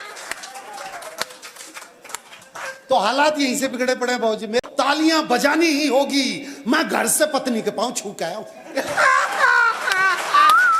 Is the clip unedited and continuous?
no; 1 cut; at 4.7 s

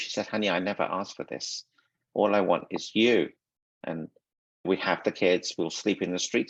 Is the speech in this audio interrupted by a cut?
no; 0 cuts

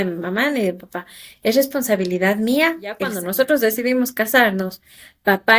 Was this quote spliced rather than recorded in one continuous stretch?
yes; 1 cut; at 3.2 s

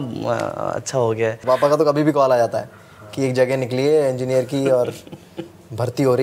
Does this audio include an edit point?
yes; 1 cut; at 1.4 s

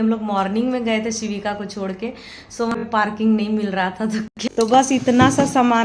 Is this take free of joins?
no; 2 cuts; at 2.7 s, 4.2 s

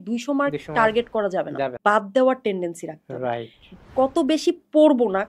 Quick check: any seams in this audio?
yes; 1 cut; at 1.7 s

